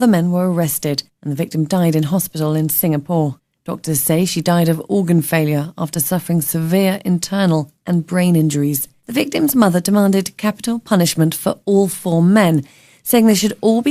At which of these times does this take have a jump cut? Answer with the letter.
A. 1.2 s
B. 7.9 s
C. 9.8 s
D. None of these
C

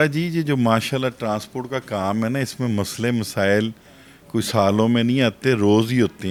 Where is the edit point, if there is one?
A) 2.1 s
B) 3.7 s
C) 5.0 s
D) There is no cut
D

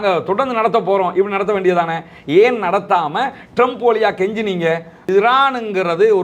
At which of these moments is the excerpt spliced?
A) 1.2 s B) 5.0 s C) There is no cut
B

